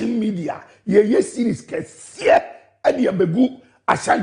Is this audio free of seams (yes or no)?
no